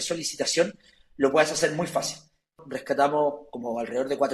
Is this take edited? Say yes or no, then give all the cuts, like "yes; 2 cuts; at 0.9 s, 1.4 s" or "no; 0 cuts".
yes; 1 cut; at 2.6 s